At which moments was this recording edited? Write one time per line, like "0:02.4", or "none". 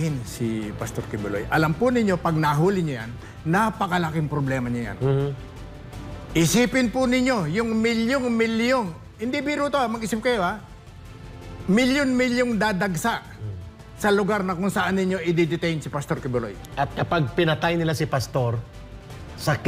none